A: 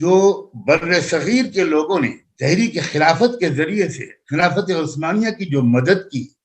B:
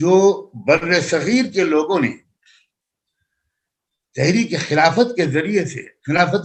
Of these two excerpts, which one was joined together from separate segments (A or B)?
A